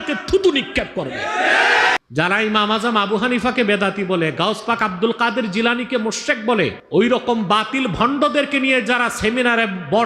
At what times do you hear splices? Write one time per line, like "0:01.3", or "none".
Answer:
0:02.0
0:06.8